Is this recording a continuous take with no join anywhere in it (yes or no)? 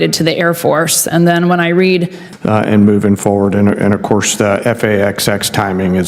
no